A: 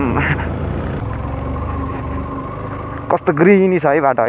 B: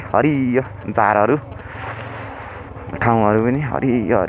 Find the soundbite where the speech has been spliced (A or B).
A